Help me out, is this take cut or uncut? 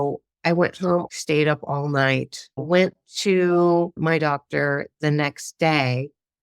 cut